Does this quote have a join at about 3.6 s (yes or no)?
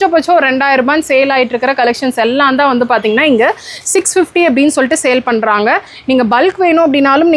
no